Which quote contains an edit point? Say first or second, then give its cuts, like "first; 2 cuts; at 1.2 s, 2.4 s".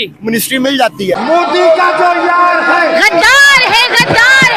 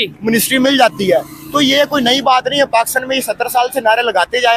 first; 1 cut; at 1.1 s